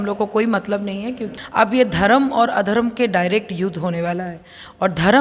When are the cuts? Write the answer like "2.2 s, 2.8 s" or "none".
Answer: 1.3 s